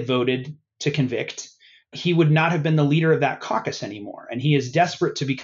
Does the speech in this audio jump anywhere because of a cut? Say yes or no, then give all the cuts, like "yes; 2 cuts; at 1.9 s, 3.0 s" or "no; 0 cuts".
no; 0 cuts